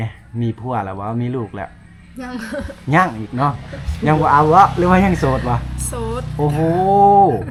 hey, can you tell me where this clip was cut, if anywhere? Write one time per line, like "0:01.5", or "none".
none